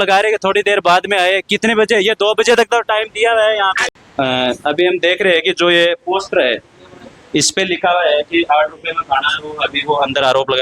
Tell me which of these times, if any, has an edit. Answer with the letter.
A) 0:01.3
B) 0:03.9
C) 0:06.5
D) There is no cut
B